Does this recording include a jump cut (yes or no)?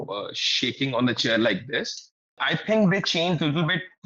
yes